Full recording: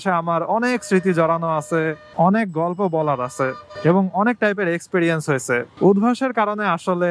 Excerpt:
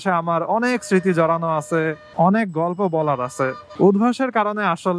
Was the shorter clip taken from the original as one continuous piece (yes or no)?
no